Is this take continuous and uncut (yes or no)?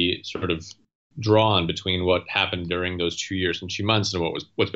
yes